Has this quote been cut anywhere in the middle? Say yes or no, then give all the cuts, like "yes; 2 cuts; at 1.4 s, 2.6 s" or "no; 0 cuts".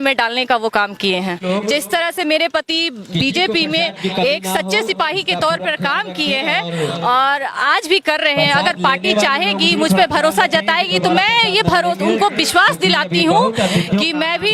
yes; 1 cut; at 1.4 s